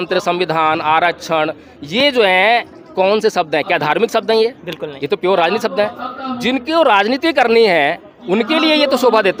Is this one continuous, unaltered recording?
yes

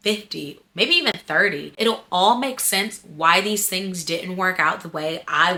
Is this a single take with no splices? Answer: yes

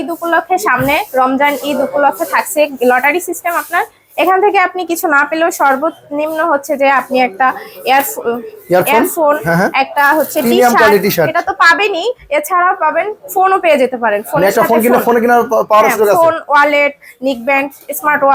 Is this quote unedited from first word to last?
yes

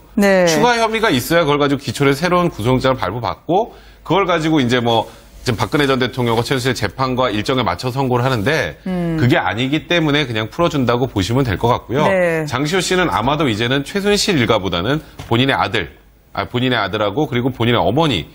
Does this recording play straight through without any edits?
no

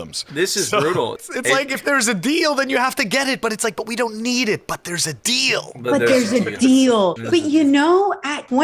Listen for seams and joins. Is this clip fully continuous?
no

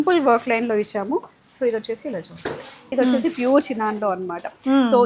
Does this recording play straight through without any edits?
no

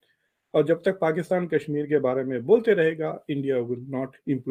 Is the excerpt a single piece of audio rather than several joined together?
yes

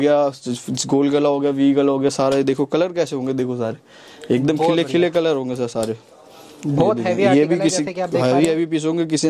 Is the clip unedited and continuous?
yes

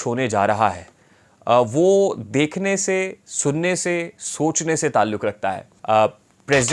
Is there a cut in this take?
yes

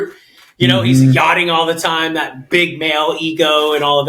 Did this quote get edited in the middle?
no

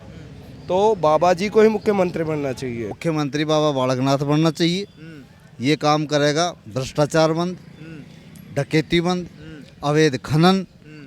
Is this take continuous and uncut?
no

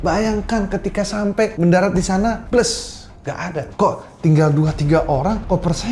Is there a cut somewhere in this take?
yes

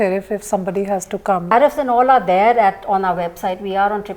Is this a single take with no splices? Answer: no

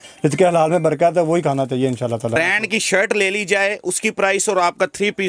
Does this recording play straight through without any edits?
no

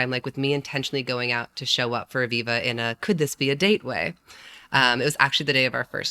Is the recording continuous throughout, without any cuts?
yes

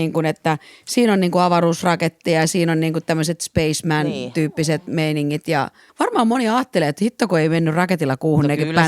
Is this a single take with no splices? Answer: no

